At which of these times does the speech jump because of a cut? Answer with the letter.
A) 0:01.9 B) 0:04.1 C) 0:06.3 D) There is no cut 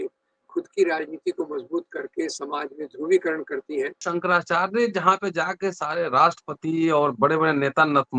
B